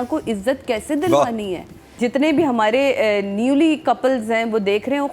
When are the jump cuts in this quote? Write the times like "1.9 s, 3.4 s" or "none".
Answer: 1.9 s